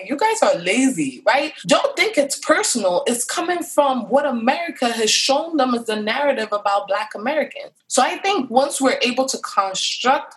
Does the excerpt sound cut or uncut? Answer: cut